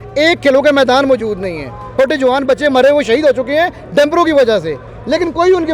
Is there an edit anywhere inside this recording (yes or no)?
yes